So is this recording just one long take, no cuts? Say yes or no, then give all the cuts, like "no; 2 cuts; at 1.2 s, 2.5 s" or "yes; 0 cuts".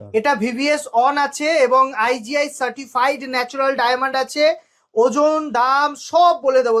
yes; 0 cuts